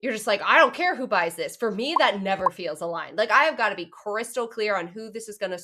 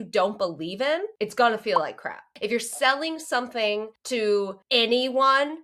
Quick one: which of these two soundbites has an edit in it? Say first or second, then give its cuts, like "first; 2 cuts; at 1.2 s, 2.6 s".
second; 4 cuts; at 1.1 s, 2.3 s, 4.0 s, 4.6 s